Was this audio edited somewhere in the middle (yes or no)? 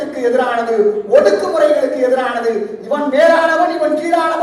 no